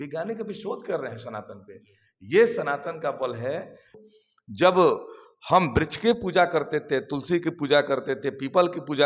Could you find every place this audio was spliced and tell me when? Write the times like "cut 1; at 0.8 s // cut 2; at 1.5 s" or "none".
cut 1; at 4.0 s